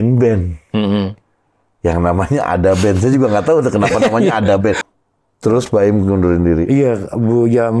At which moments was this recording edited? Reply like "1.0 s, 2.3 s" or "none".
4.8 s